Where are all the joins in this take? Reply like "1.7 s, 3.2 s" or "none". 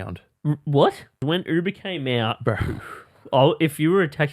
1.2 s